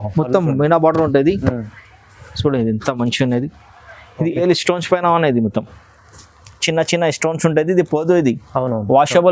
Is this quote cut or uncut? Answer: cut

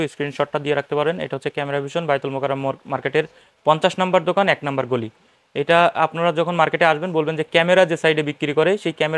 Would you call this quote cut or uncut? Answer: uncut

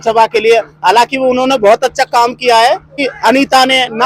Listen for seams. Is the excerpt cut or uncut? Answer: cut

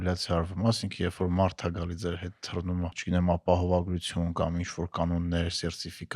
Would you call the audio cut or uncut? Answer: cut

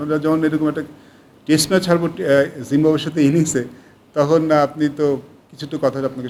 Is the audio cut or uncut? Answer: uncut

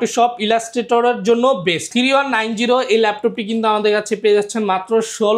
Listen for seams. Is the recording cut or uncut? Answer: cut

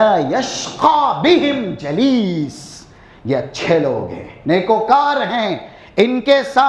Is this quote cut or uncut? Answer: uncut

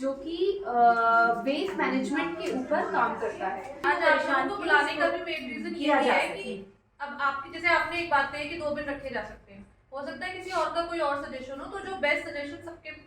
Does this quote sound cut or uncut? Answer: cut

